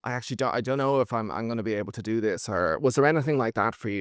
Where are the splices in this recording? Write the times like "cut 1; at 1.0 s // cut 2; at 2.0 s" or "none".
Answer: none